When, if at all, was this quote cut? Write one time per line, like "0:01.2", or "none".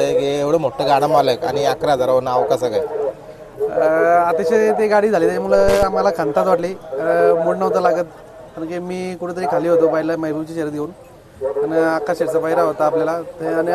none